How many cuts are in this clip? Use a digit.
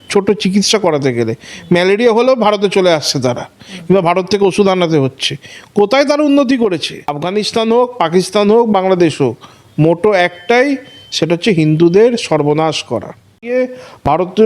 2